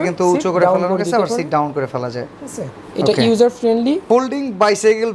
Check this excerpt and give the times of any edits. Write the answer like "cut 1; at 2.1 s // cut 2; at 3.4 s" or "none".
cut 1; at 4.0 s